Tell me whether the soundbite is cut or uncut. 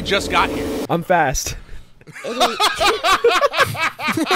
uncut